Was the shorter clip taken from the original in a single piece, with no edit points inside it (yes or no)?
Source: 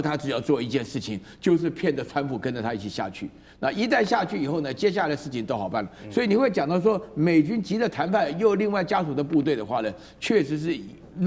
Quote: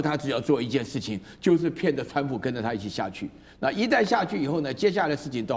yes